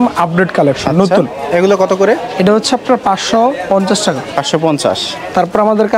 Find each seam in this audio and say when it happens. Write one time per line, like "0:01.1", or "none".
none